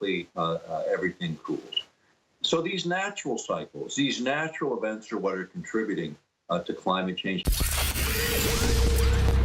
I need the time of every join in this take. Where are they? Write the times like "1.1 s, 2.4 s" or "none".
7.4 s

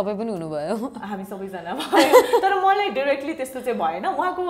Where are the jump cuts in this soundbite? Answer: none

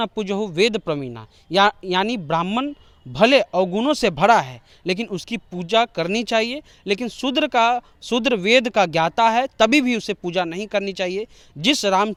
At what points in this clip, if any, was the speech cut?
none

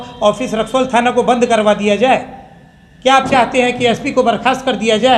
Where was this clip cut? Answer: none

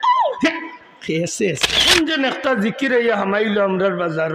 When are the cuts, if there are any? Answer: 1.9 s

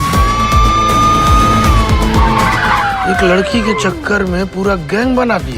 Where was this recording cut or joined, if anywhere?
3.1 s

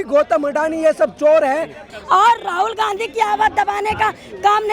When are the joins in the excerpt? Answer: 1.8 s

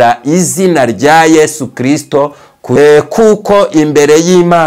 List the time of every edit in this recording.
2.6 s

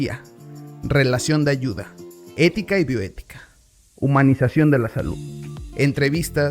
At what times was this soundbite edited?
4.7 s

